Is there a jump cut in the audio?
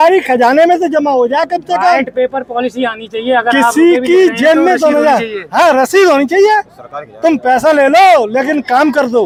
no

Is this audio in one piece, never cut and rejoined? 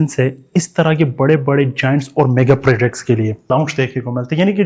no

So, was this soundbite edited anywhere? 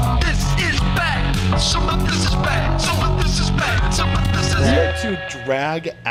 no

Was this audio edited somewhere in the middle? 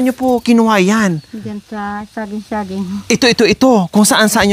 no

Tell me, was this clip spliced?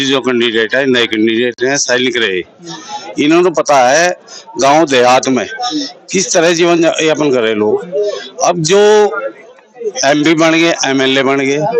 no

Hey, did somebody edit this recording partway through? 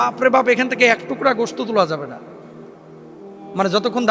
no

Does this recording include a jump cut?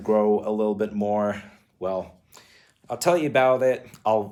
no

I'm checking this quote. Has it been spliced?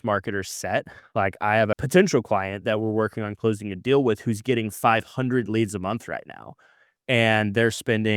yes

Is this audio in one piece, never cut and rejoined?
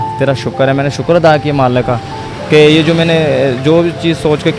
yes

